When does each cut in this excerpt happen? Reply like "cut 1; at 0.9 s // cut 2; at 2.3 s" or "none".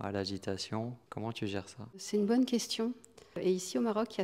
cut 1; at 1.0 s // cut 2; at 2.0 s // cut 3; at 3.4 s